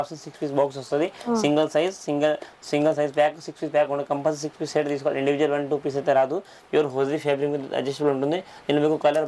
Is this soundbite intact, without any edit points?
yes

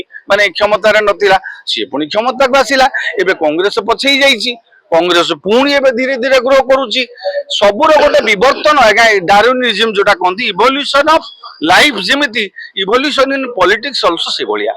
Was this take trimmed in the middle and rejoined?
no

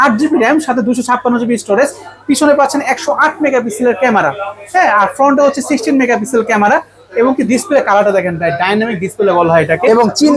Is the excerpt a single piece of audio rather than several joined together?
yes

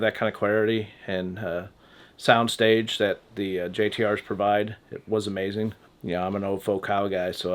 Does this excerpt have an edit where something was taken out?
yes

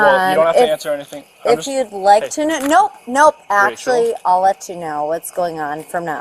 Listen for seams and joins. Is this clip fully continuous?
yes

